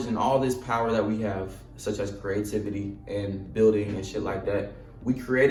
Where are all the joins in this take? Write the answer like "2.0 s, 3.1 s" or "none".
none